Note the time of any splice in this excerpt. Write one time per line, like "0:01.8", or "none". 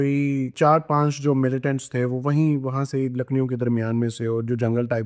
none